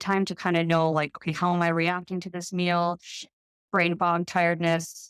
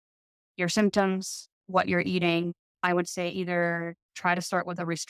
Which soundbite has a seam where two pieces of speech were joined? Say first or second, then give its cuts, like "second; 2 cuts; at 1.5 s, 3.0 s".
second; 1 cut; at 2.6 s